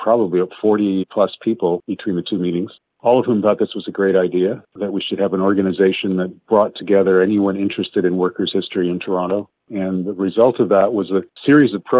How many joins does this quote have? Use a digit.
1